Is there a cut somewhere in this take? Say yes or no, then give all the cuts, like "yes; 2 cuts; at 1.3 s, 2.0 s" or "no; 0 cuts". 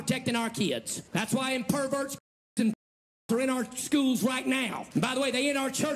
yes; 2 cuts; at 1.0 s, 4.8 s